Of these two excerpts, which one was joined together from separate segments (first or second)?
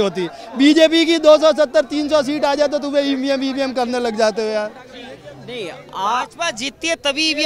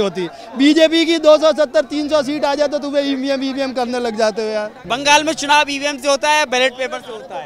second